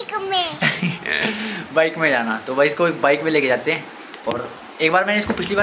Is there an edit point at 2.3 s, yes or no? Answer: no